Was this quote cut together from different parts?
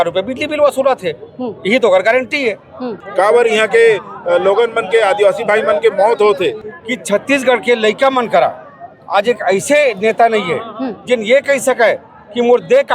yes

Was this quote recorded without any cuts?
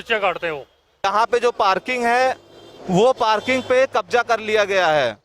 no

